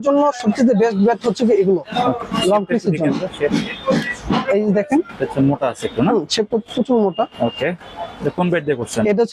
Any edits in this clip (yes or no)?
no